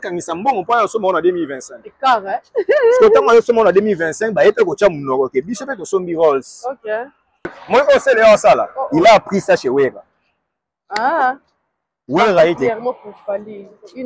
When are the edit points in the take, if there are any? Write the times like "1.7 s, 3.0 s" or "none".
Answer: 7.6 s, 12.6 s